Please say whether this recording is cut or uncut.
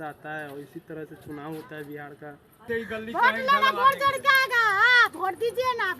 cut